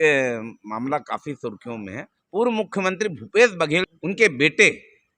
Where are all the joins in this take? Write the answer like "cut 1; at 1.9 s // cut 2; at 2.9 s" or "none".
cut 1; at 3.9 s

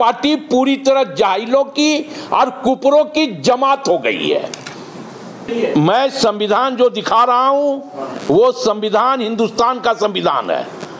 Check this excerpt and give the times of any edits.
cut 1; at 5.4 s

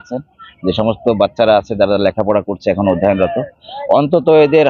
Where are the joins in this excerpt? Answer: none

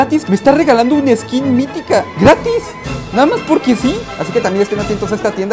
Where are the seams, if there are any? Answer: cut 1; at 4.1 s

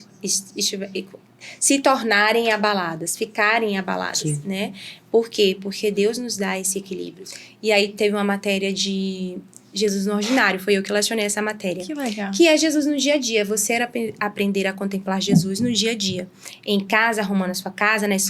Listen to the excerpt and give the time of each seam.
cut 1; at 7.2 s

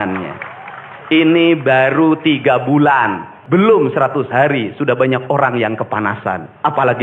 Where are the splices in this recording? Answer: cut 1; at 3.3 s

